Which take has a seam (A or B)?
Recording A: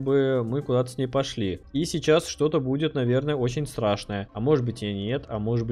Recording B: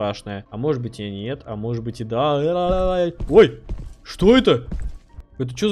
A